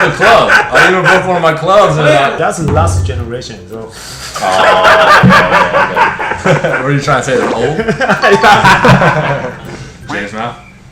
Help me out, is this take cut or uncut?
cut